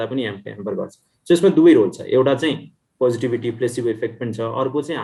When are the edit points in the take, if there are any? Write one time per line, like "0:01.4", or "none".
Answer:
none